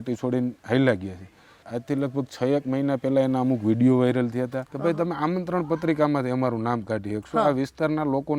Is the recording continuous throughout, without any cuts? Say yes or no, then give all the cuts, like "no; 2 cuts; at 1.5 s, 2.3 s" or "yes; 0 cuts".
no; 2 cuts; at 1.7 s, 4.6 s